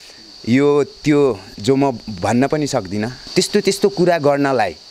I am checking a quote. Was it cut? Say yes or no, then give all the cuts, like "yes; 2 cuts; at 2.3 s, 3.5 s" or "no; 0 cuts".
yes; 1 cut; at 3.2 s